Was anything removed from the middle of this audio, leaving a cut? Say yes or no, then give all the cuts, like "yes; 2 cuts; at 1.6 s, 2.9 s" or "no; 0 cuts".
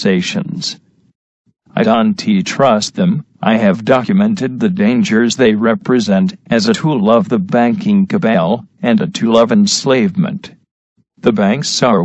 yes; 1 cut; at 5.2 s